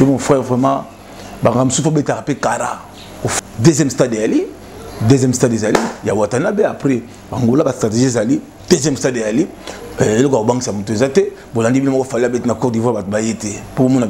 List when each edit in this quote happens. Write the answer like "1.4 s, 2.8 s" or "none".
3.2 s